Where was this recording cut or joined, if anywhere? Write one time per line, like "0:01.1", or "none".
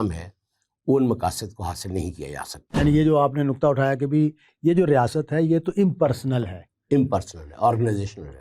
0:02.6